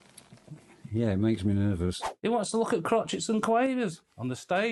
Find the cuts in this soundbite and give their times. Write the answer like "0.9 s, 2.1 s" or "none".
2.0 s

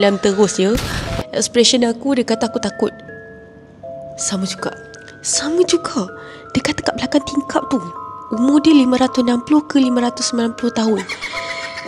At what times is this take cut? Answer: 1.0 s

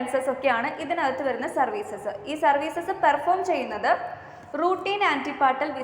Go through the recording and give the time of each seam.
none

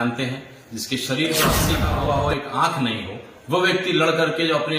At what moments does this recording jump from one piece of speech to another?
1.9 s

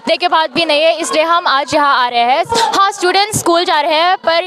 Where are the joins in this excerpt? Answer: none

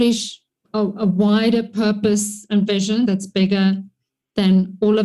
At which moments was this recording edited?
3.1 s

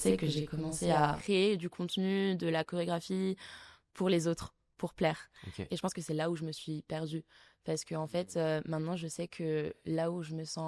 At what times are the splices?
1.2 s

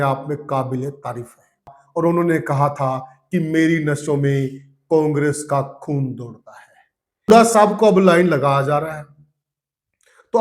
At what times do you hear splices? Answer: 1.8 s, 7.3 s

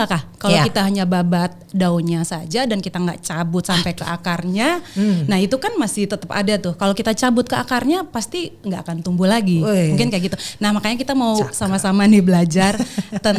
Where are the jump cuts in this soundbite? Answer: none

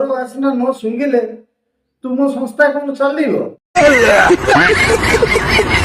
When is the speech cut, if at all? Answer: 1.3 s, 3.7 s

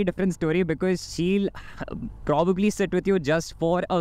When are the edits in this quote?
none

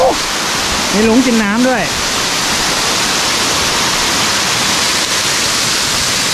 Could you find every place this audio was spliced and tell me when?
none

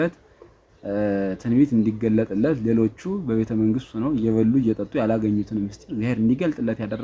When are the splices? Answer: none

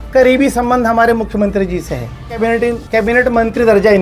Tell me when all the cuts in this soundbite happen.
2.4 s

